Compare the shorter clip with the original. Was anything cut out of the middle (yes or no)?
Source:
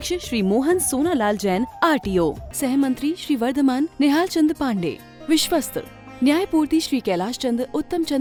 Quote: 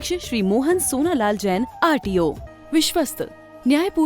yes